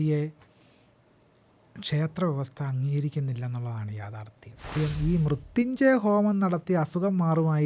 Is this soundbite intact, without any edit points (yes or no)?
no